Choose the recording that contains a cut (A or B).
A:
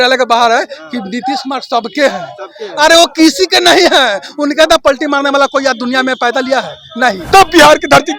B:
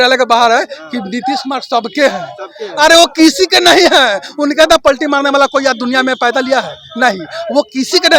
A